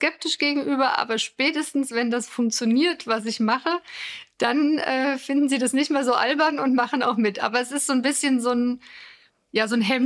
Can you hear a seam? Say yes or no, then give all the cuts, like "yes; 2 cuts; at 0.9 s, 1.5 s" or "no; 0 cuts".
no; 0 cuts